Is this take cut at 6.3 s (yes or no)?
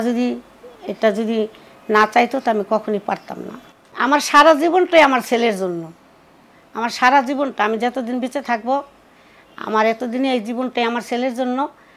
no